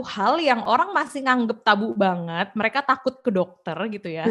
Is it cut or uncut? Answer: uncut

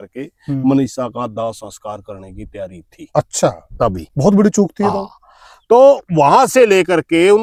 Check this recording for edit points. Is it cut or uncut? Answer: uncut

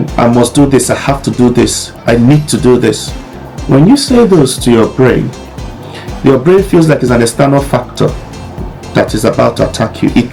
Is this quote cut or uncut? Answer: uncut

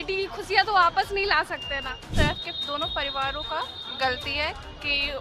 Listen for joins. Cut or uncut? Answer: cut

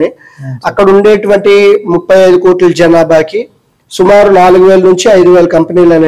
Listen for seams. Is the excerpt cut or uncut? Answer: uncut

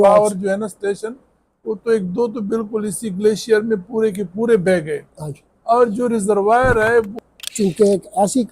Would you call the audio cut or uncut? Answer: cut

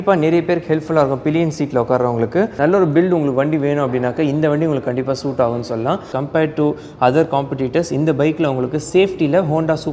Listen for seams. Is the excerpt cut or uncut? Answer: cut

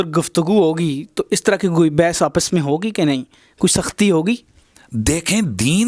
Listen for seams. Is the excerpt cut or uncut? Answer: uncut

